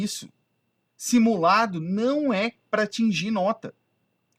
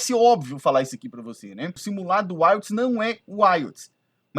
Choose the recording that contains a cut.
second; 1 cut; at 1.8 s

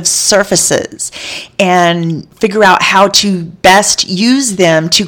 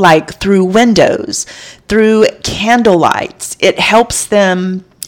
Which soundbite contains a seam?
first; 1 cut; at 2.2 s

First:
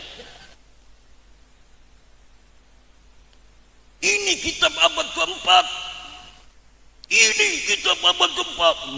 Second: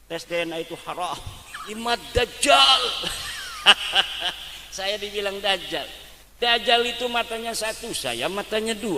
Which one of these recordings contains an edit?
second; 1 cut; at 1.8 s

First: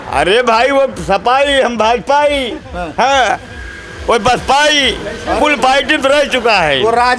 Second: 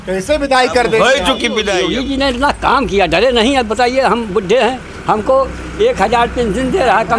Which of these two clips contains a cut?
second; 1 cut; at 1.8 s

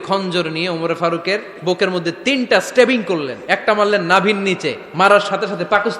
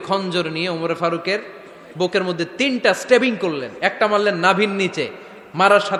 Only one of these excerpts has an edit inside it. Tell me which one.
first; 2 cuts; at 1.5 s, 4.8 s

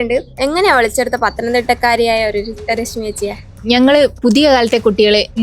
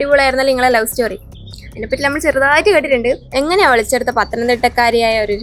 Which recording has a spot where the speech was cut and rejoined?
first; 1 cut; at 3.4 s

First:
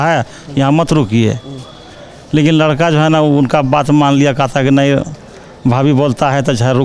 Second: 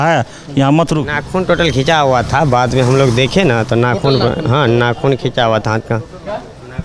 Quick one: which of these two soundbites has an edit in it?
second; 1 cut; at 1.1 s

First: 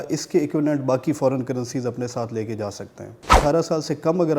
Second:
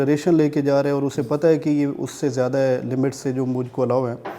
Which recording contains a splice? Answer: first; 1 cut; at 3.3 s

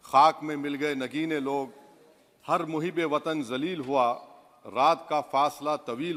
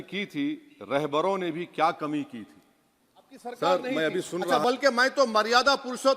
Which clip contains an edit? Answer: second; 1 cut; at 4.5 s

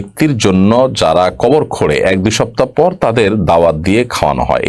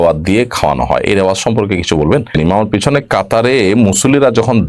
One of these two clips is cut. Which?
second; 1 cut; at 2.4 s

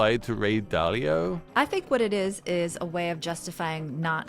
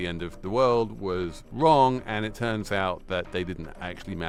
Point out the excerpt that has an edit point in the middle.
first; 1 cut; at 1.4 s

